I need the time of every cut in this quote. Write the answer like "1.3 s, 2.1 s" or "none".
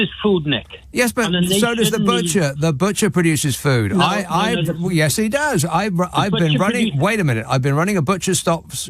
none